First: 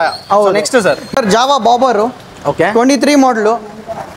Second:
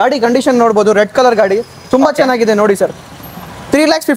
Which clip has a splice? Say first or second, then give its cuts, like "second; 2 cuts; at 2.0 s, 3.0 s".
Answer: first; 1 cut; at 1.1 s